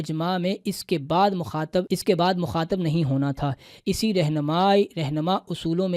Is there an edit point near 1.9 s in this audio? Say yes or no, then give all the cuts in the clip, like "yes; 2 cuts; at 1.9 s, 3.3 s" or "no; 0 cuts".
yes; 1 cut; at 1.9 s